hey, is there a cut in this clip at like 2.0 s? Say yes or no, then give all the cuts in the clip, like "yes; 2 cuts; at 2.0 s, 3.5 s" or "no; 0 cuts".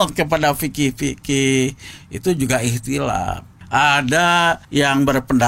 no; 2 cuts; at 3.5 s, 4.6 s